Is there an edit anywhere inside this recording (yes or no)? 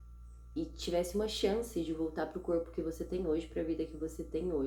no